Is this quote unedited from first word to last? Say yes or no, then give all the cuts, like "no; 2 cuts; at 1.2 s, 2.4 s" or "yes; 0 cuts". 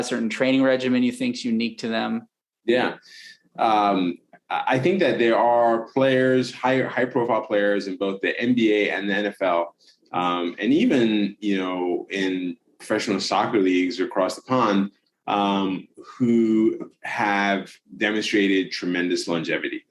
yes; 0 cuts